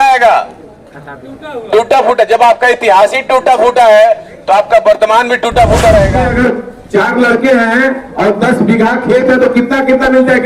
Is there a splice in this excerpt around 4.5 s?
no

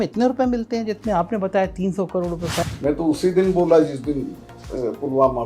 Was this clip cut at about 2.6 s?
yes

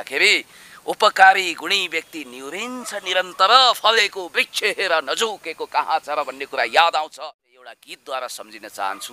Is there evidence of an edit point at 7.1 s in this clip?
yes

